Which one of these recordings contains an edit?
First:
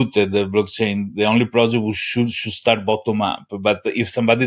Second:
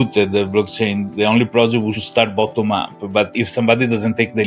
second; 2 cuts; at 2.0 s, 3.3 s

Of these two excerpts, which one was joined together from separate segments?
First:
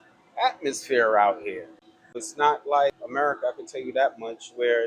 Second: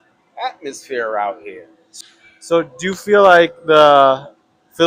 first; 2 cuts; at 2.3 s, 3.0 s

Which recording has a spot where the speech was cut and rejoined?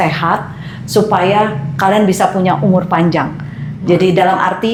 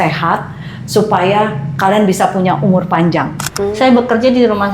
second; 1 cut; at 3.5 s

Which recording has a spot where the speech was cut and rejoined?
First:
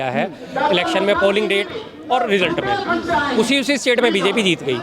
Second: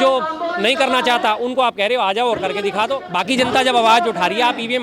second; 1 cut; at 3.0 s

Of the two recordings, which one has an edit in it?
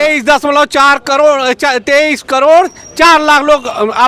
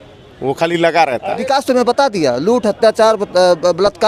second; 1 cut; at 1.3 s

